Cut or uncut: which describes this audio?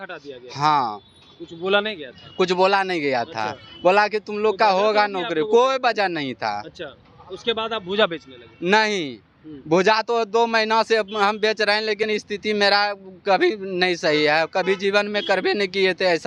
uncut